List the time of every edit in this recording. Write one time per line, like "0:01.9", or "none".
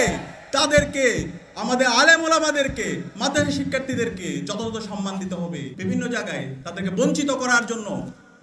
0:05.7